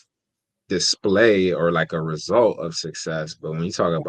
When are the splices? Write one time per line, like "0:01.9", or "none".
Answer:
none